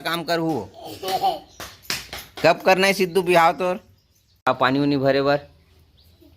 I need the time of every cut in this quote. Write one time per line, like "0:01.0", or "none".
0:04.5